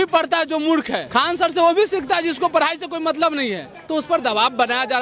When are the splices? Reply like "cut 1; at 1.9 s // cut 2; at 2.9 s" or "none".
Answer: cut 1; at 1.0 s // cut 2; at 3.7 s